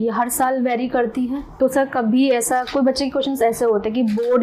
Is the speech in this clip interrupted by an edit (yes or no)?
yes